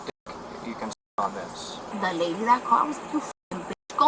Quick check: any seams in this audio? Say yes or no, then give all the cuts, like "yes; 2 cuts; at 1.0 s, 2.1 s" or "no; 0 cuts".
yes; 1 cut; at 1.9 s